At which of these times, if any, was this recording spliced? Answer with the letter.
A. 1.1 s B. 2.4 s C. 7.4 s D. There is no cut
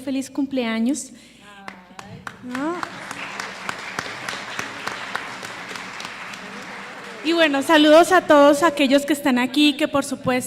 C